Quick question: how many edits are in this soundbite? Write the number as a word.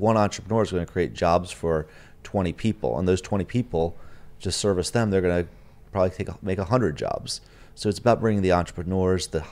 zero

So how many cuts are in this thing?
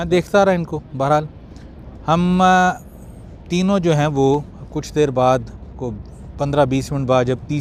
zero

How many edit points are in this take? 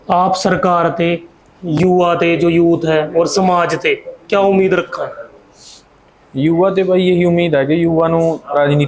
zero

